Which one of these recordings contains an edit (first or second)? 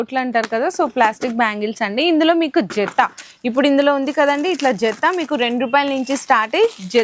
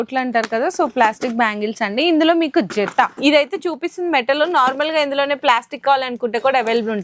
second